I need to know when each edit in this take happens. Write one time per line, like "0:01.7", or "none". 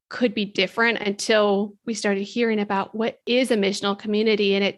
0:03.2